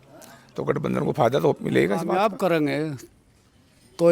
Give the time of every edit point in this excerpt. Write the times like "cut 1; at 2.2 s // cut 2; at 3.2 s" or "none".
cut 1; at 2.1 s